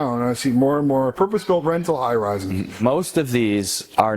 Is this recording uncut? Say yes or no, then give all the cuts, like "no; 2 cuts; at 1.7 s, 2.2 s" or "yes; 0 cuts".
no; 2 cuts; at 1.1 s, 2.7 s